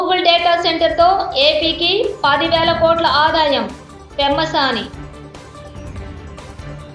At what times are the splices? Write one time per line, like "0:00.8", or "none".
none